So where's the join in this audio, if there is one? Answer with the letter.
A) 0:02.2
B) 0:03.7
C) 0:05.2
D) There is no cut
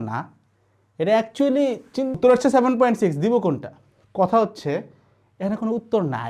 A